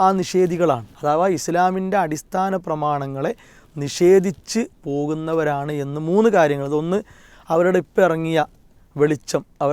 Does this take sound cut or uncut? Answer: cut